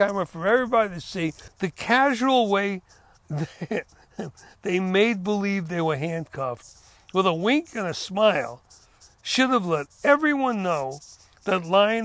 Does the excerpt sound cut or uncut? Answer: cut